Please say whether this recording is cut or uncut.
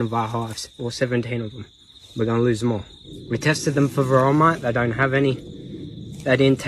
uncut